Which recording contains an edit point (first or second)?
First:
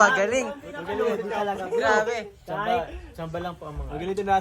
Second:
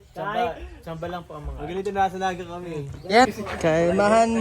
second